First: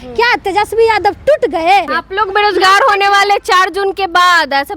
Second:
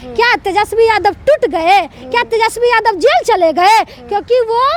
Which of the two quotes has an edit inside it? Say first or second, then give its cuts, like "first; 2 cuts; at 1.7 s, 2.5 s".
first; 1 cut; at 2.0 s